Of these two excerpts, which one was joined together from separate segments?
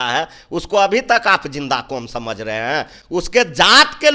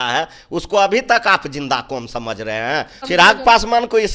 second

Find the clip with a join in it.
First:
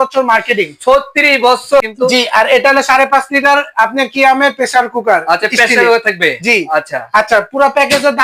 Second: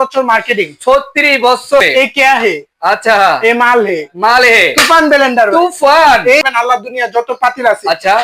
second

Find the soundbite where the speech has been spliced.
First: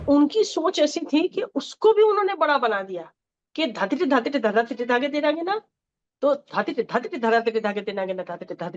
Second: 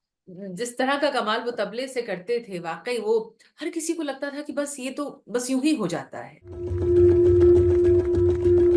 second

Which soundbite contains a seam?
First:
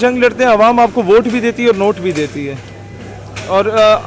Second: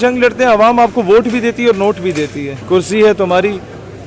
second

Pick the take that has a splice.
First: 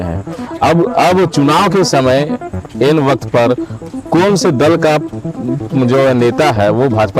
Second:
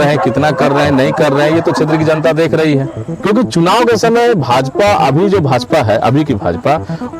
second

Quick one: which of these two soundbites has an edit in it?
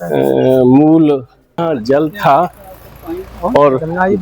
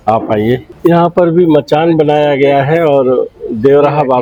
first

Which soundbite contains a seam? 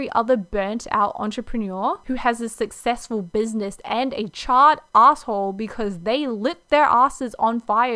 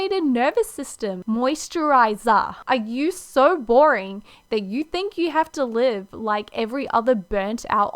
second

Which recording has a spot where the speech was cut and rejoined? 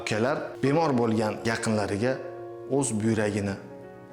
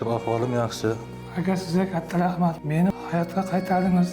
second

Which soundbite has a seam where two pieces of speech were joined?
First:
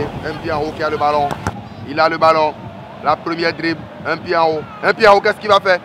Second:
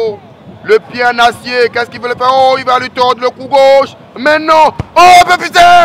first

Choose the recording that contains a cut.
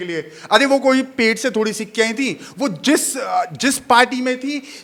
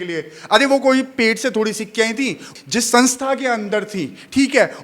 second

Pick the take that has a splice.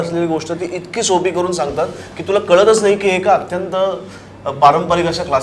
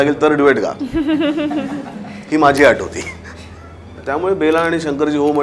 second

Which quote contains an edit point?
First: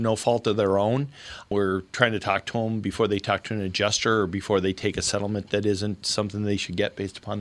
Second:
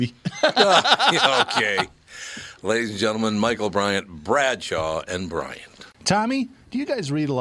second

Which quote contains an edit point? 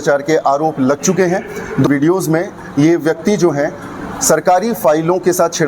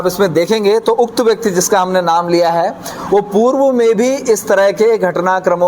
first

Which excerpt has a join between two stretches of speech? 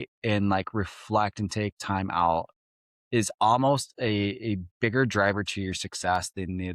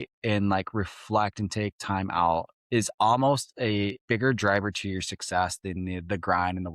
second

